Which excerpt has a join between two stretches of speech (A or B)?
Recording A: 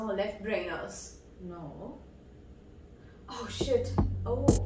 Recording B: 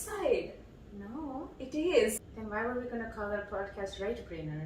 B